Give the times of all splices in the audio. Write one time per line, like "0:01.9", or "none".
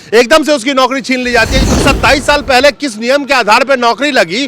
0:01.8